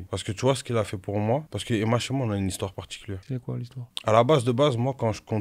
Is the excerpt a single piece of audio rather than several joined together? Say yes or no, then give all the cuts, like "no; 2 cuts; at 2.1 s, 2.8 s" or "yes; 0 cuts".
yes; 0 cuts